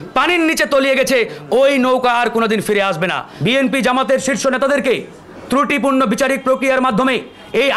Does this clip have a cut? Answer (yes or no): yes